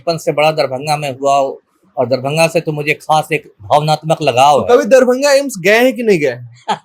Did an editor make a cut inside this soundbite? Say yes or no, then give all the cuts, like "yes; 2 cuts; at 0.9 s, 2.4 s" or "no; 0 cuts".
no; 0 cuts